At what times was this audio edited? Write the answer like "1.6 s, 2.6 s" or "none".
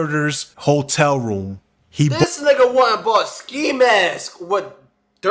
none